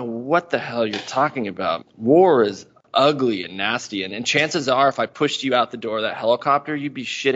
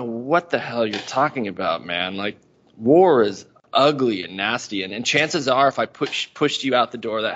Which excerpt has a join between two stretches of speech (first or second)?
first